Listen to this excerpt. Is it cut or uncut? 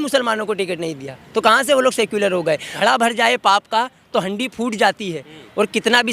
cut